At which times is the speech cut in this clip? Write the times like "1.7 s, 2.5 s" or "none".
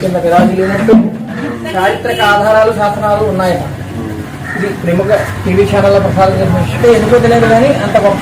6.8 s